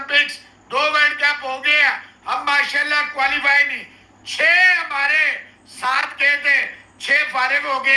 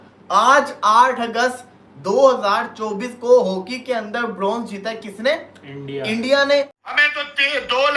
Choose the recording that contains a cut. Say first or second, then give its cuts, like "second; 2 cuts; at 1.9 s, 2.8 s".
second; 1 cut; at 6.7 s